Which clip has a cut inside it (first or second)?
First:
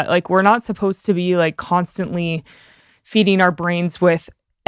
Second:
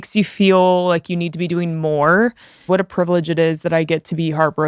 second